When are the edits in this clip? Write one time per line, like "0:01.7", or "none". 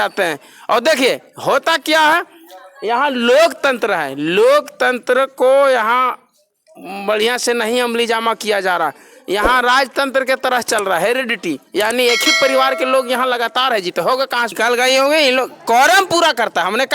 0:14.5